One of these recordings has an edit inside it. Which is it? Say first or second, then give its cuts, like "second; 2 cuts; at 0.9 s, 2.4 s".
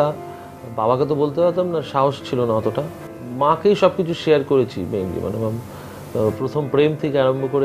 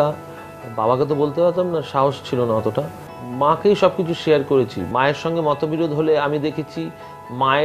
second; 1 cut; at 4.9 s